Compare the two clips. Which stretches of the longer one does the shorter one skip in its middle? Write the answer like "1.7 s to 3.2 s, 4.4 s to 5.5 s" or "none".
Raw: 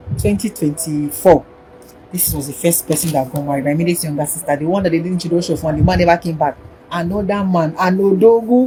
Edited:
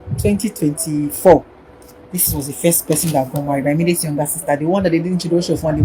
none